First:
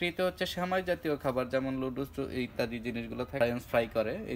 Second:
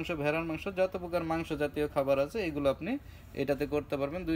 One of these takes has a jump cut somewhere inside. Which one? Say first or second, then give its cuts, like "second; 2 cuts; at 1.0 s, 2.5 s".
first; 1 cut; at 3.4 s